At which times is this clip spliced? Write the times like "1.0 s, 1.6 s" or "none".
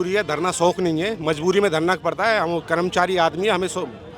none